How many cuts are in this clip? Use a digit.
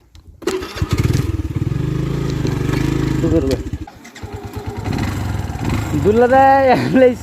1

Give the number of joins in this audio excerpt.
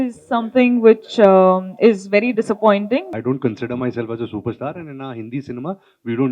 1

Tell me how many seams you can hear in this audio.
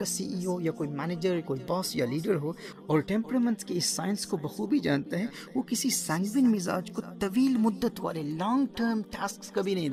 0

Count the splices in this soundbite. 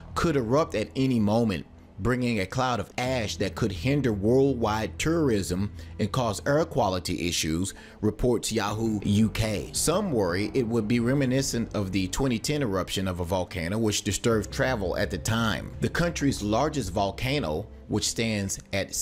1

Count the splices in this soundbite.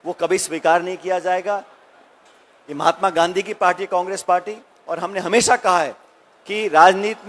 0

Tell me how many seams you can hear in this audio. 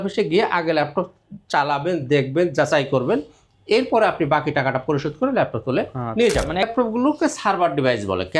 1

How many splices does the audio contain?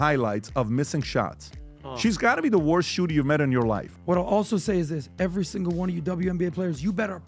1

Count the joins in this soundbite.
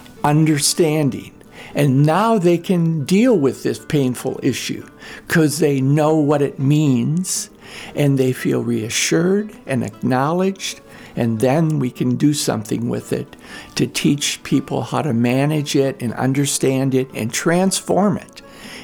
0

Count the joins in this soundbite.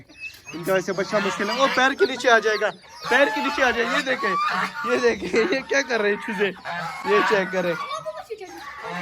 0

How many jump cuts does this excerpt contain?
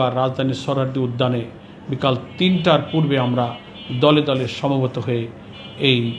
0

